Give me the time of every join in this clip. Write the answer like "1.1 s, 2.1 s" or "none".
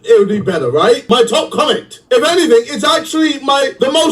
1.0 s